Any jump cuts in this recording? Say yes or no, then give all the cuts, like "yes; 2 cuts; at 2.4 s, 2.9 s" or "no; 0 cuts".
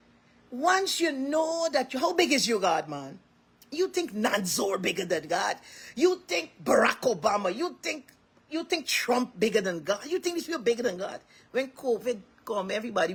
no; 0 cuts